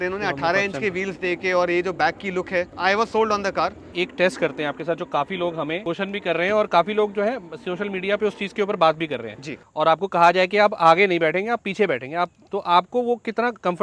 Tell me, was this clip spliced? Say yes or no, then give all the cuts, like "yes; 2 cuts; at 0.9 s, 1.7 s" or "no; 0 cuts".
yes; 4 cuts; at 2.7 s, 3.9 s, 5.8 s, 9.3 s